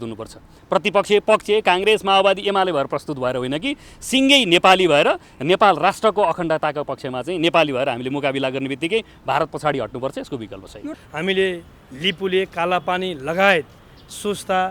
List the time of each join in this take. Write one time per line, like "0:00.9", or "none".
0:11.0